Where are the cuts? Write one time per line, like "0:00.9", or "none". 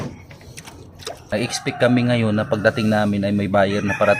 0:01.2